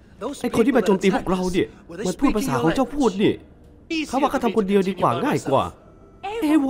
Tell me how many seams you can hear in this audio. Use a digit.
1